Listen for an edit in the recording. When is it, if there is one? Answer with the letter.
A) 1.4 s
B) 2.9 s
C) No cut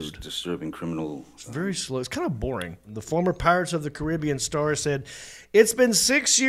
B